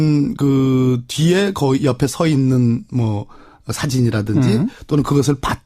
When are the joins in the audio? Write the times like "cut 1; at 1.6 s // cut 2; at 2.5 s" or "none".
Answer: none

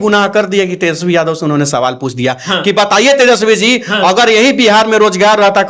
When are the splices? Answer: none

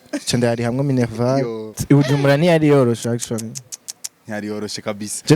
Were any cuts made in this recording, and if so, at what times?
cut 1; at 1.7 s

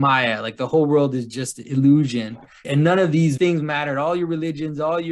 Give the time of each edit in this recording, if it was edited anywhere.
cut 1; at 2.5 s // cut 2; at 3.4 s

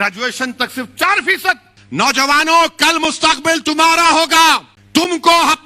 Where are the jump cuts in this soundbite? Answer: cut 1; at 1.7 s // cut 2; at 4.7 s

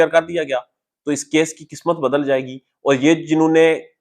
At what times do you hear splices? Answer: none

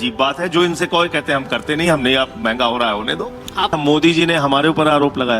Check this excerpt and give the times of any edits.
cut 1; at 3.4 s

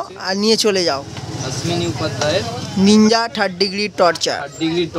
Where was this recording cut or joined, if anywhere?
none

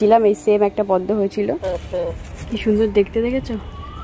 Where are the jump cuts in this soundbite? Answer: cut 1; at 1.6 s

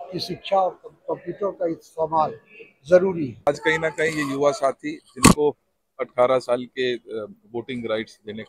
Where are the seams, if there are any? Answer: cut 1; at 3.5 s

